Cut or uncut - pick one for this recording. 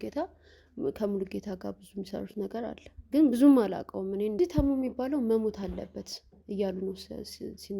cut